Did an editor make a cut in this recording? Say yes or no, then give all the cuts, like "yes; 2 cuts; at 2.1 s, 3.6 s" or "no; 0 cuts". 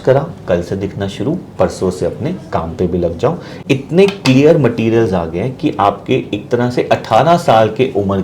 yes; 1 cut; at 3.5 s